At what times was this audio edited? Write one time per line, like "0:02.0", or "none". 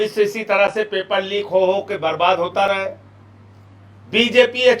none

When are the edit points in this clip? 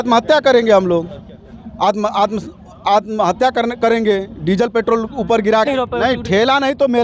0:05.7

